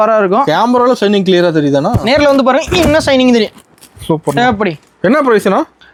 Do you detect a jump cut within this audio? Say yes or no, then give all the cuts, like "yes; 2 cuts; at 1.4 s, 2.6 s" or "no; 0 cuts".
no; 0 cuts